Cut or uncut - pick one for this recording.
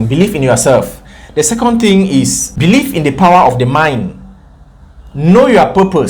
uncut